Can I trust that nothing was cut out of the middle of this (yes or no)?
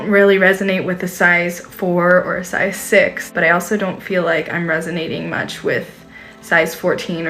no